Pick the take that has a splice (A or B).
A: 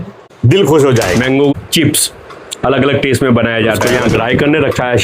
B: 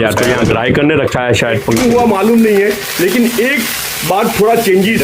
A